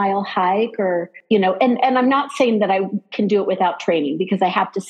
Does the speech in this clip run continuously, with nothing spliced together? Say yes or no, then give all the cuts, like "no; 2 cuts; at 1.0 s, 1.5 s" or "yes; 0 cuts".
no; 1 cut; at 1.1 s